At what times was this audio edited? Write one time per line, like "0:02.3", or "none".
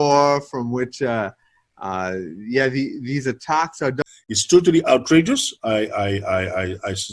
0:04.0